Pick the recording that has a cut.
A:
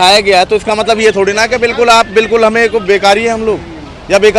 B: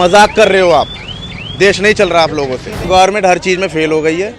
B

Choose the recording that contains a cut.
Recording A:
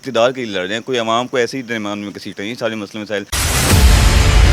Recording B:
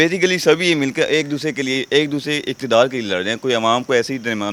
A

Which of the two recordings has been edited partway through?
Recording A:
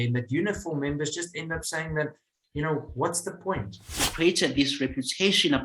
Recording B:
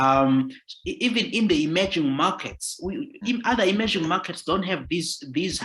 A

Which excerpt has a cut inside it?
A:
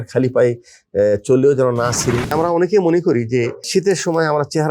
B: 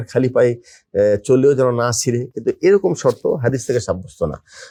A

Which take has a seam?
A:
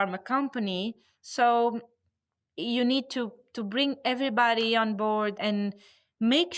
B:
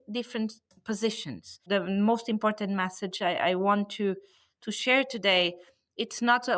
B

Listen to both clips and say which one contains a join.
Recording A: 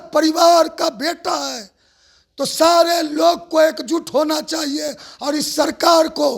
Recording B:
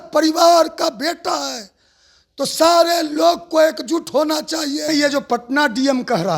B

